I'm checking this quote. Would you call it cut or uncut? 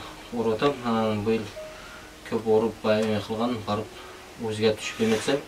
uncut